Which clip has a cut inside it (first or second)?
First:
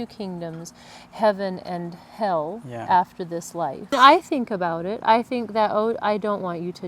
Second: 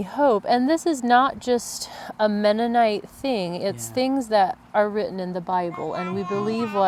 first